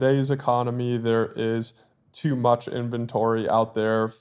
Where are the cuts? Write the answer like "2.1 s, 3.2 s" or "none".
none